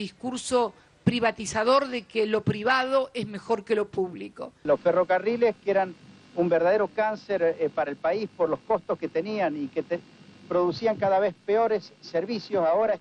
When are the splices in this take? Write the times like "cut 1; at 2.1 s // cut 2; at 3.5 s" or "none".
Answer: cut 1; at 4.5 s